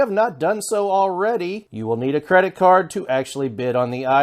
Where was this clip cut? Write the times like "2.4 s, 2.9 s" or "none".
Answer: 1.7 s